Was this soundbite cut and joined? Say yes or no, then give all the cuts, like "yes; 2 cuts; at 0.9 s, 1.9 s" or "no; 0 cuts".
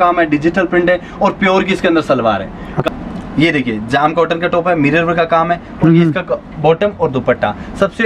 yes; 1 cut; at 2.9 s